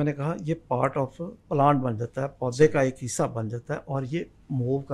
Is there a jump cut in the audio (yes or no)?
no